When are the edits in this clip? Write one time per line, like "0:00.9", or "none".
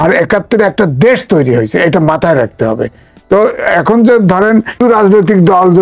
0:04.8